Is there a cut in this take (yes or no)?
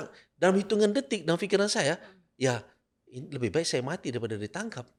no